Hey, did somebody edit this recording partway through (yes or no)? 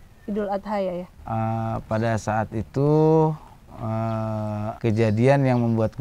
yes